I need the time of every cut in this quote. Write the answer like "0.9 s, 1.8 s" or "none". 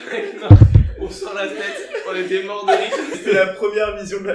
3.2 s